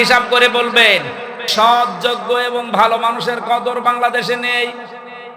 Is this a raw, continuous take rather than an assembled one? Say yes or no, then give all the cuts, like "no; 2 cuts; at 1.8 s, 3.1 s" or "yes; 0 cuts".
no; 1 cut; at 1.5 s